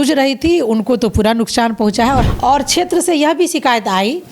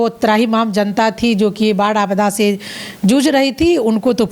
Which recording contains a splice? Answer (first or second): first